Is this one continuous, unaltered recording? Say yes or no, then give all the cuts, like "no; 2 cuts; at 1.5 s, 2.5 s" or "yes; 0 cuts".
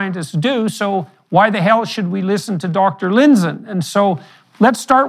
yes; 0 cuts